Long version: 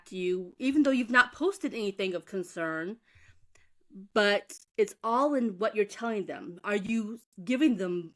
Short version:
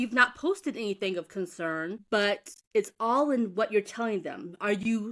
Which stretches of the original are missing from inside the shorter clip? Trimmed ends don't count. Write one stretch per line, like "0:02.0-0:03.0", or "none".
0:03.0-0:04.0